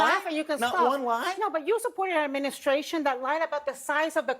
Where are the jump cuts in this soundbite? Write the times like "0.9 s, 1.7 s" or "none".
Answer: 1.2 s